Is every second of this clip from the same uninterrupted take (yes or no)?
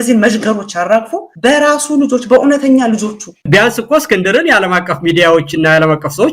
no